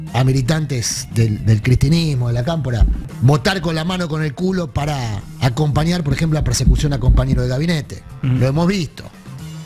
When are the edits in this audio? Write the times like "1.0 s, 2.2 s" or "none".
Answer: 3.0 s

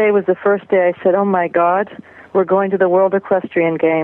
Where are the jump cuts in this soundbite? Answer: none

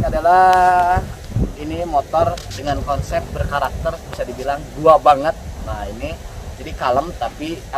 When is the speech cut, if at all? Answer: none

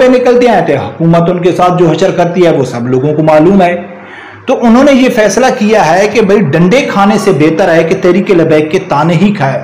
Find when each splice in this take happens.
none

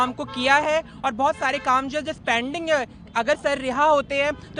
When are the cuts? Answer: none

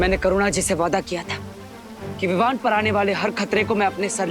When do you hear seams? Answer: none

